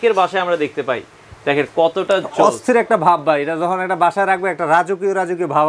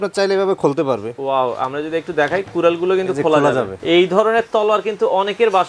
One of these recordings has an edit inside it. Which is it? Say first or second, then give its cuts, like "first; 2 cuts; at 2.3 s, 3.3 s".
second; 1 cut; at 3.7 s